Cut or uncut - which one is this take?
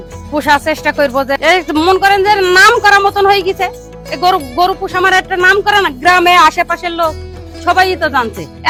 uncut